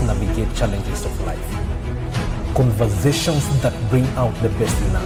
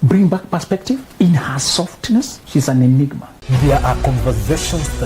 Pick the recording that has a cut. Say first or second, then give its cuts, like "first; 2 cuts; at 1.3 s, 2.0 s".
second; 3 cuts; at 1.1 s, 2.4 s, 3.3 s